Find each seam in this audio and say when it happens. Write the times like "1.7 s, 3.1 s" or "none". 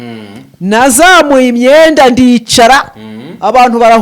none